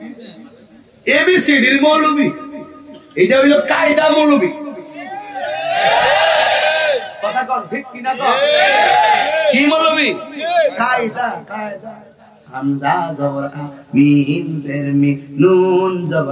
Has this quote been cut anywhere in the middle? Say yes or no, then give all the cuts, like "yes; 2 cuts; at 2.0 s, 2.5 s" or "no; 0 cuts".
no; 0 cuts